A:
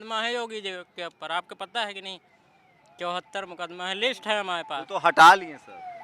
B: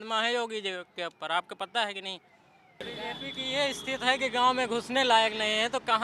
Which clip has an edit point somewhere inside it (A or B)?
B